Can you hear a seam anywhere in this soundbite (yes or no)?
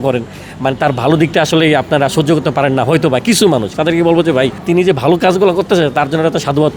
yes